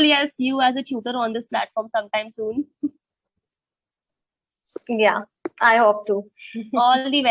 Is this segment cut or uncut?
uncut